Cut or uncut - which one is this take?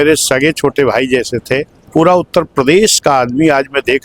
cut